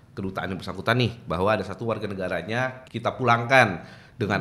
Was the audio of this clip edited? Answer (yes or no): yes